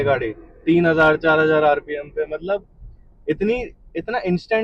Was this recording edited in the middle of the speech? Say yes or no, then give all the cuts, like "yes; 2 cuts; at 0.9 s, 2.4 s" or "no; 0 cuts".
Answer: no; 0 cuts